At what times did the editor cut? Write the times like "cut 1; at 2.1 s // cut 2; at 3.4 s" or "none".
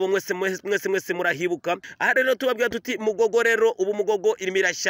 cut 1; at 1.9 s